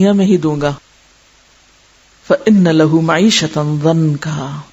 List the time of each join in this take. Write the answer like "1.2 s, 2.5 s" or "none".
1.5 s